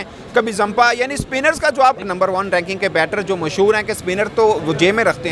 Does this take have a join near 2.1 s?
yes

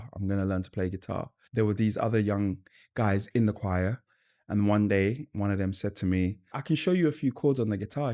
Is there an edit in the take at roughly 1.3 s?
yes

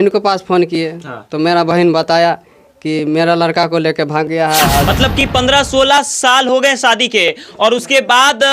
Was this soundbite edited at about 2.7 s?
no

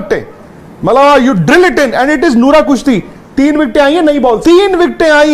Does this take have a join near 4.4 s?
yes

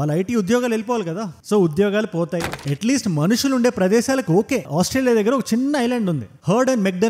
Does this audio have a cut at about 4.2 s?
no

